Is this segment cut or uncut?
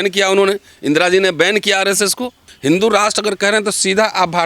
cut